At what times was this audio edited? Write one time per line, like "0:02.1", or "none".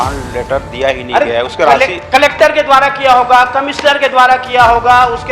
none